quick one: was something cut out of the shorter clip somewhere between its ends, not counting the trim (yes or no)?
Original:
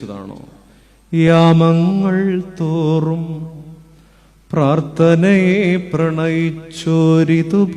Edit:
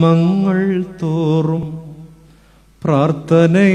yes